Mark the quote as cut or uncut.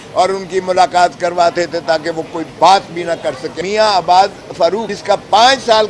cut